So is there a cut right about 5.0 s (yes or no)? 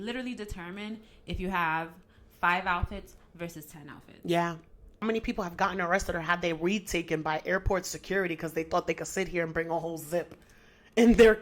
yes